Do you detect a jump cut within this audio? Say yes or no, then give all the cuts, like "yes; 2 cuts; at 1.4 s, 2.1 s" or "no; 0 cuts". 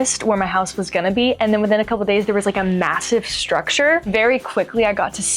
yes; 1 cut; at 4.1 s